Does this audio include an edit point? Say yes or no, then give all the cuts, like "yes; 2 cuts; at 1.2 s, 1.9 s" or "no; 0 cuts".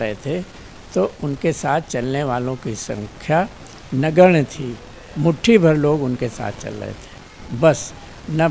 no; 0 cuts